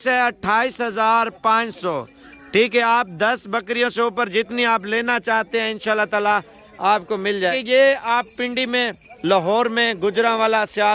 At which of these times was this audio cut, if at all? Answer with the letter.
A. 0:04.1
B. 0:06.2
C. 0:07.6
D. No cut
C